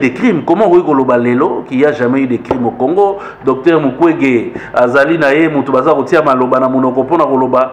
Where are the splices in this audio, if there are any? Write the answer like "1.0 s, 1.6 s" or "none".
none